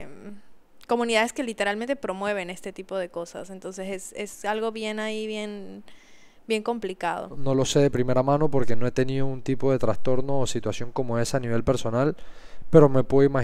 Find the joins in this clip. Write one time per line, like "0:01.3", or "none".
0:07.3